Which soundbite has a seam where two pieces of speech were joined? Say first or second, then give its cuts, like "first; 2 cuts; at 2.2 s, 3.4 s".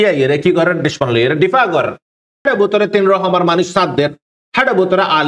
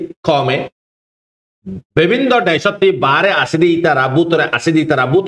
first; 1 cut; at 2.4 s